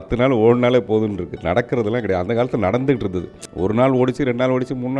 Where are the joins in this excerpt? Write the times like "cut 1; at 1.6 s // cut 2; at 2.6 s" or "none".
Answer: cut 1; at 3.4 s

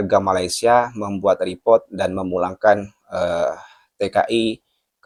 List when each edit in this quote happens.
none

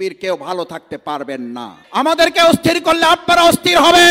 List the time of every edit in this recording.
cut 1; at 1.8 s

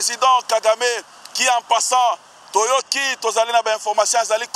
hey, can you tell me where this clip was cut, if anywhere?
none

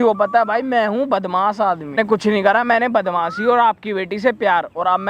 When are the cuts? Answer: cut 1; at 2.0 s

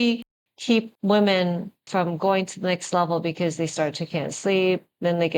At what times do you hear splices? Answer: cut 1; at 0.9 s // cut 2; at 1.7 s

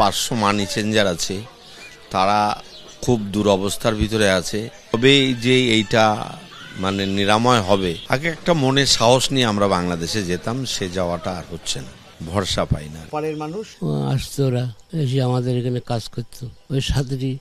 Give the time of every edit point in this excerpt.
cut 1; at 13.0 s

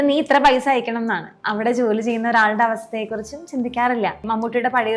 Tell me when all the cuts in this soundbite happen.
cut 1; at 1.4 s // cut 2; at 4.2 s

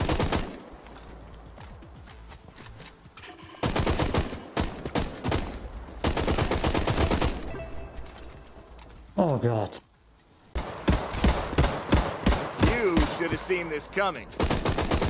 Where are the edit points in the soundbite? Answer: cut 1; at 10.6 s

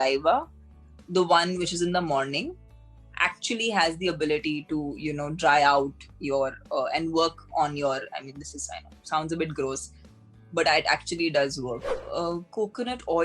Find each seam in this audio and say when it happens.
cut 1; at 11.9 s

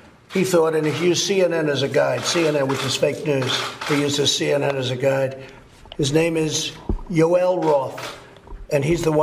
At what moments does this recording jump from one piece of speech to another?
cut 1; at 8.1 s

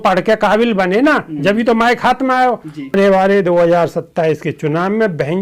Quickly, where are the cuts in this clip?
cut 1; at 2.9 s

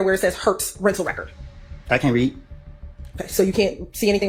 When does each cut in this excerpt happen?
none

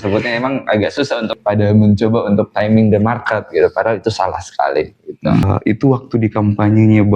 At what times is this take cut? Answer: cut 1; at 1.4 s // cut 2; at 5.4 s

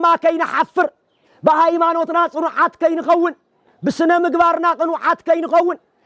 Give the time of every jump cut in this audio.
none

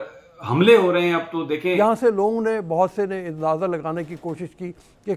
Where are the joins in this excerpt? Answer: cut 1; at 1.7 s

